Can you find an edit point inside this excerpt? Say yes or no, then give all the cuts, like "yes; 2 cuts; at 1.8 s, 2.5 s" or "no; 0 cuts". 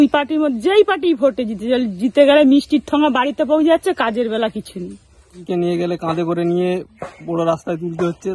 yes; 1 cut; at 5.4 s